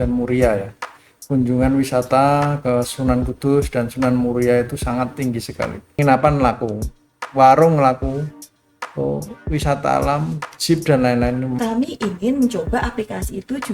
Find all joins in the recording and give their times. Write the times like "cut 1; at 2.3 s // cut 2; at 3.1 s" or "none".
cut 1; at 5.9 s // cut 2; at 11.5 s